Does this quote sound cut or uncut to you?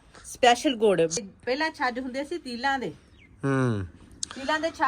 cut